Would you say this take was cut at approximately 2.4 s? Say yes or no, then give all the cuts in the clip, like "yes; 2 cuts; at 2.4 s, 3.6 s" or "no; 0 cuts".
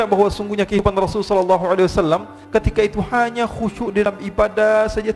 no; 0 cuts